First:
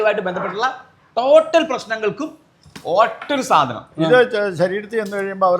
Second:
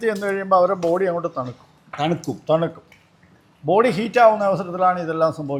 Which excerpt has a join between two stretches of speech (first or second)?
first